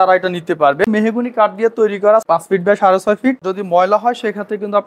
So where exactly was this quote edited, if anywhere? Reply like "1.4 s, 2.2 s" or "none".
0.9 s, 2.2 s, 3.4 s

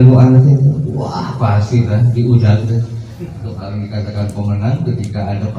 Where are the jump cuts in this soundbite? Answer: 3.4 s

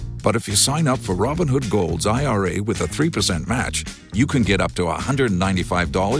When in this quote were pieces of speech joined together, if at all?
none

